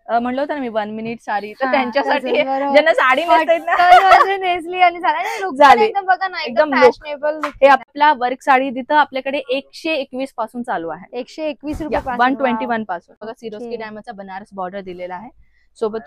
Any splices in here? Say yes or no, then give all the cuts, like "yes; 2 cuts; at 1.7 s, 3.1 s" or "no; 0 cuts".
yes; 2 cuts; at 7.8 s, 13.3 s